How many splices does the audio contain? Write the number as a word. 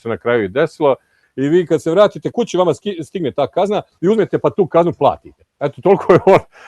one